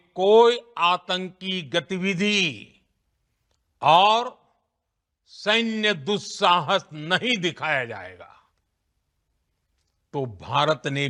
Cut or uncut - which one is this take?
uncut